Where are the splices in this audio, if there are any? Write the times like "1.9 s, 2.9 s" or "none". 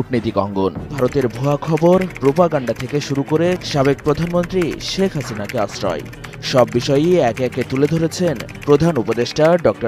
0.9 s